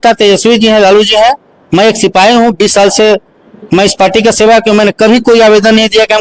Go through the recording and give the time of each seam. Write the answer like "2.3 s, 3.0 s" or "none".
none